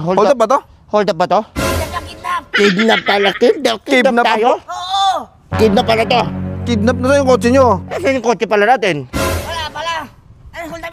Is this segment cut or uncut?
uncut